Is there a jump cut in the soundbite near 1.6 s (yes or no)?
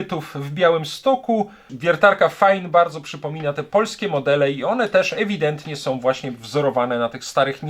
yes